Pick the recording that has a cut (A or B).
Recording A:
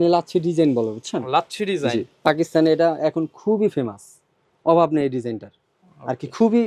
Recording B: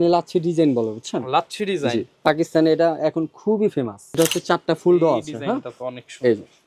B